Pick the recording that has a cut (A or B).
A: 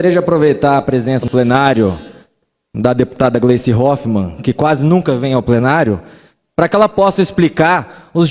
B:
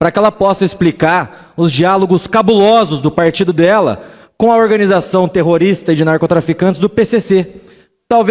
A